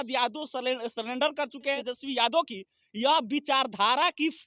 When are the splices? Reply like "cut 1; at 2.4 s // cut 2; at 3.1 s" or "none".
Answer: cut 1; at 1.8 s